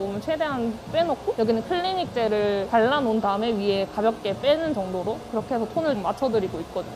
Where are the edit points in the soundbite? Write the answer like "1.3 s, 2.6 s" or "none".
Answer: 6.0 s